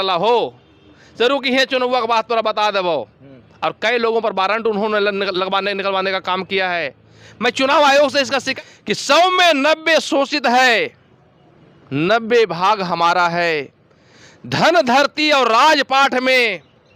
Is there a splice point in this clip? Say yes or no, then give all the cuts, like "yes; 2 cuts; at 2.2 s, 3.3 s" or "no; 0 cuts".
yes; 1 cut; at 8.4 s